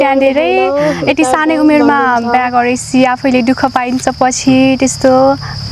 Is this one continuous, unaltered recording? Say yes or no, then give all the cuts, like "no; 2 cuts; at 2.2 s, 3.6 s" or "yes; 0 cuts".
yes; 0 cuts